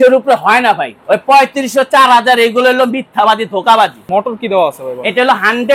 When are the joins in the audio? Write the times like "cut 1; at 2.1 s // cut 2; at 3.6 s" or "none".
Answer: cut 1; at 0.9 s // cut 2; at 4.0 s